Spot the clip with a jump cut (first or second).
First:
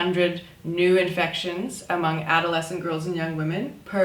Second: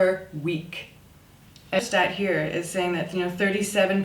second